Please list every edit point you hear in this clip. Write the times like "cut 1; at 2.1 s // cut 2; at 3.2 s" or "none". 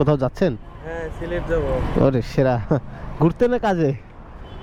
none